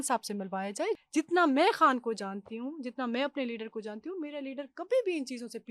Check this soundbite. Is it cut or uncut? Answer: cut